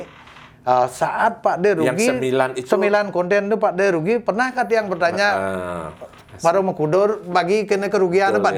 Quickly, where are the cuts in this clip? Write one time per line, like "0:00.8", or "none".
none